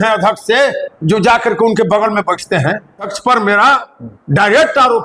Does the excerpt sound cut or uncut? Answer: cut